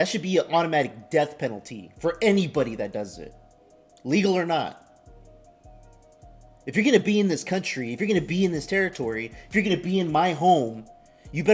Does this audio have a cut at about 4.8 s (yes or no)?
yes